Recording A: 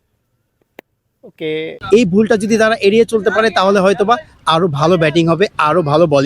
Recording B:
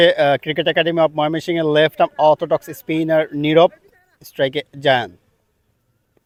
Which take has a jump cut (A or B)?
A